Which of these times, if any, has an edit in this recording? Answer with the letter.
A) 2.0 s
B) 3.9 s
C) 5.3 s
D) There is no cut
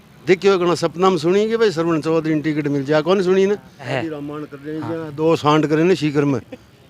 B